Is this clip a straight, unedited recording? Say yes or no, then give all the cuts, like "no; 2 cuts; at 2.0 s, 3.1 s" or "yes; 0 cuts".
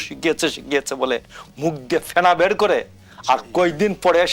yes; 0 cuts